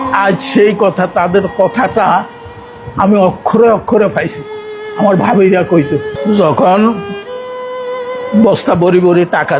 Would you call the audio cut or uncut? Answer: cut